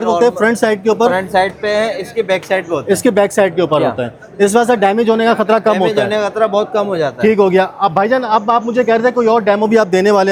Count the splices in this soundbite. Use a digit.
0